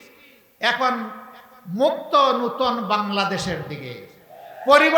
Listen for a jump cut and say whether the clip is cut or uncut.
uncut